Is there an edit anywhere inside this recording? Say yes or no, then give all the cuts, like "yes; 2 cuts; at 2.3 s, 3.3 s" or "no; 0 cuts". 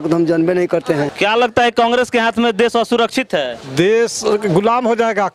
yes; 1 cut; at 1.1 s